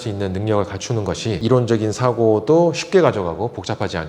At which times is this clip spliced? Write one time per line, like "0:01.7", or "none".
0:01.4